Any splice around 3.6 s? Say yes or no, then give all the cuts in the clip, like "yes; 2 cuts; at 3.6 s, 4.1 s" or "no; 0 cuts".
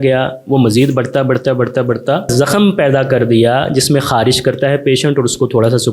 no; 1 cut; at 2.3 s